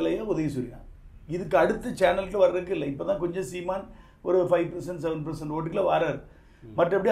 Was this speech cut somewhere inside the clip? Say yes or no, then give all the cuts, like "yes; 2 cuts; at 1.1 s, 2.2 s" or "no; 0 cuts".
no; 0 cuts